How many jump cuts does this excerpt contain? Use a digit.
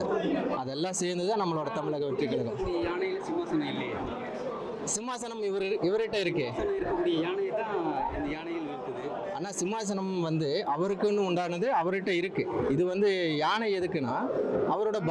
0